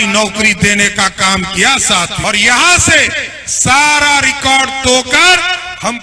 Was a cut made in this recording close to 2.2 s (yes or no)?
yes